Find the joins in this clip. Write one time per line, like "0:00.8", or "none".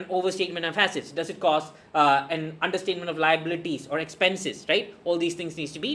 none